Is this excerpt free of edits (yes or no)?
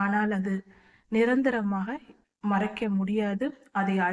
yes